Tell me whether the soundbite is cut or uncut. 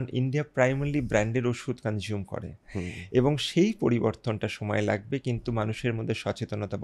uncut